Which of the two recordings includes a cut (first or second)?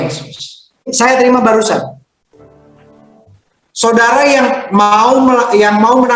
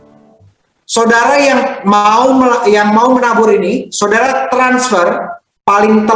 first